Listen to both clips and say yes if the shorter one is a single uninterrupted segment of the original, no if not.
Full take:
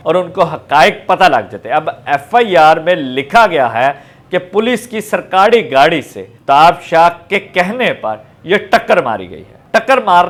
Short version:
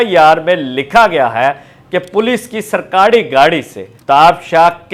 yes